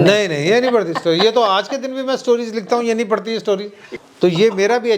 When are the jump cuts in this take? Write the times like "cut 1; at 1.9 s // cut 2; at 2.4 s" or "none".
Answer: cut 1; at 3.9 s